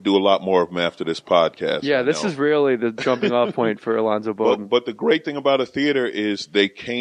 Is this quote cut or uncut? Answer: cut